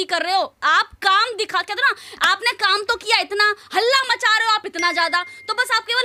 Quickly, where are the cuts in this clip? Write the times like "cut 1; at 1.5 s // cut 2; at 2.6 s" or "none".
none

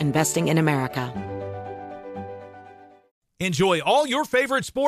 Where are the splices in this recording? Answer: cut 1; at 1.1 s

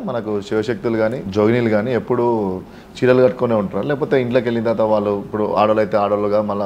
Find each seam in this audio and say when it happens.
cut 1; at 1.2 s

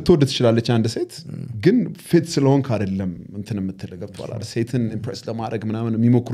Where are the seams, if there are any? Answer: none

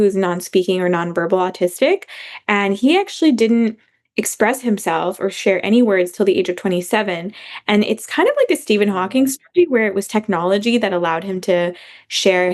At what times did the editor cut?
none

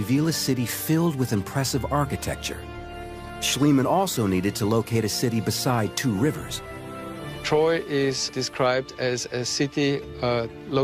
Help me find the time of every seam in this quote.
none

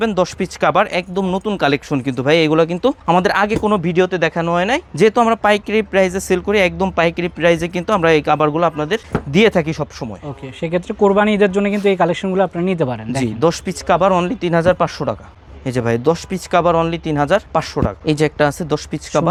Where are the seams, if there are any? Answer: none

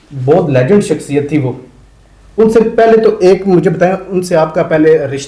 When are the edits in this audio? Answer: none

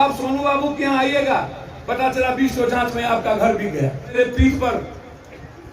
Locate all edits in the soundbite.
cut 1; at 4.1 s

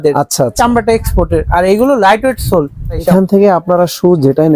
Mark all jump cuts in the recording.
cut 1; at 3.0 s

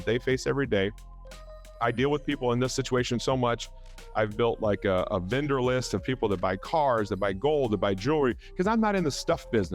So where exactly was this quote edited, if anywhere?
none

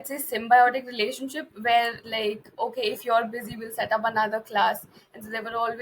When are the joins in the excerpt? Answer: cut 1; at 2.1 s

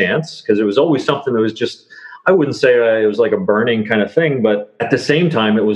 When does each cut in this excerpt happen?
cut 1; at 4.7 s

